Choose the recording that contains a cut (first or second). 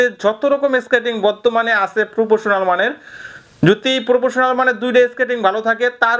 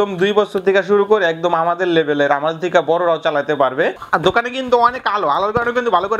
second